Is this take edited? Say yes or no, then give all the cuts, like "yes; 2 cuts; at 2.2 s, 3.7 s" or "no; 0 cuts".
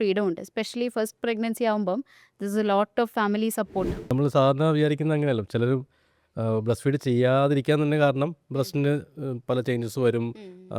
yes; 1 cut; at 4.1 s